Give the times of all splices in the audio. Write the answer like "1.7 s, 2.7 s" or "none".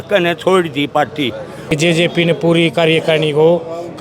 1.7 s